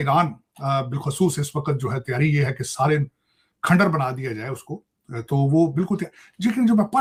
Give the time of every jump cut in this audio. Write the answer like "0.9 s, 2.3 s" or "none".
none